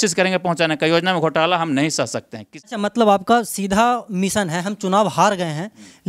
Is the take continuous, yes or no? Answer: no